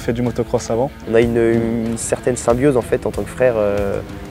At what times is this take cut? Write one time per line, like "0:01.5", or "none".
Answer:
0:01.0